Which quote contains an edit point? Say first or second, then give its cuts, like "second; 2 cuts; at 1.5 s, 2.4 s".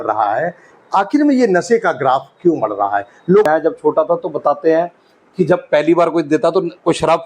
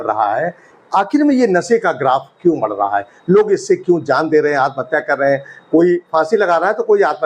first; 1 cut; at 3.5 s